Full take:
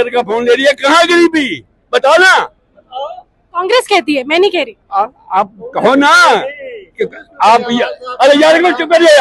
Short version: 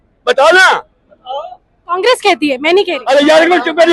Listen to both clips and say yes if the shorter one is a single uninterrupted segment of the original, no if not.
no